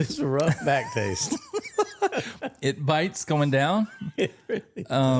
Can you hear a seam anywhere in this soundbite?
no; 0 cuts

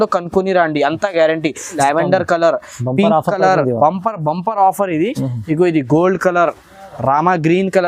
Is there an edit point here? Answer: yes; 1 cut; at 1.8 s

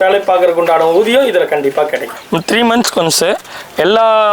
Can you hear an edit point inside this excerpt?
yes; 1 cut; at 2.2 s

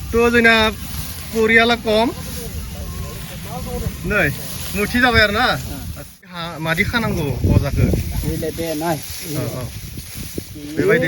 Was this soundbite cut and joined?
yes; 1 cut; at 6.1 s

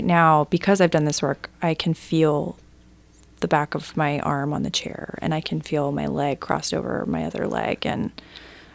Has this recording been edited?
no; 0 cuts

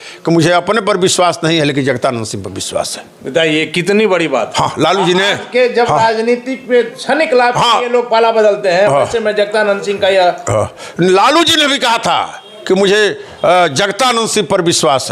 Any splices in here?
no; 0 cuts

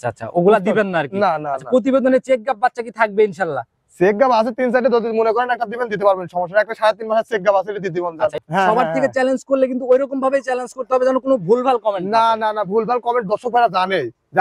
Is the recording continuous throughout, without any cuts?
no; 1 cut; at 8.4 s

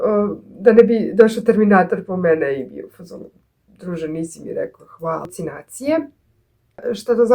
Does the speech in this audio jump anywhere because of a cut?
yes; 1 cut; at 5.3 s

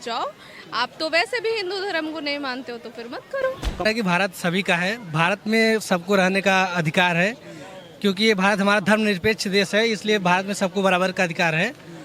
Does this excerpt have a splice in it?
yes; 1 cut; at 3.8 s

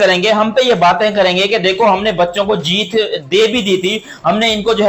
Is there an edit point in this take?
no; 0 cuts

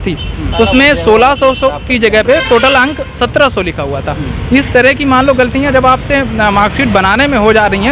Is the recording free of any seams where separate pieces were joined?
yes; 0 cuts

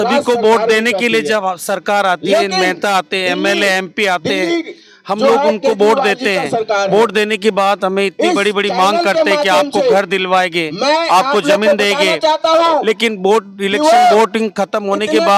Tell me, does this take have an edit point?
no; 0 cuts

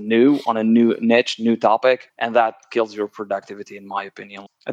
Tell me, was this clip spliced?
no; 0 cuts

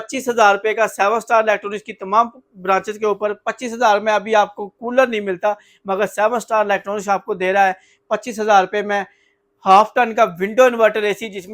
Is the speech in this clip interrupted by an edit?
no; 0 cuts

